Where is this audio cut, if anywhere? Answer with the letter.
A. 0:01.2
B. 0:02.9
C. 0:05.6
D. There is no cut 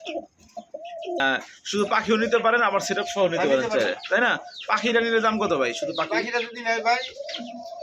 A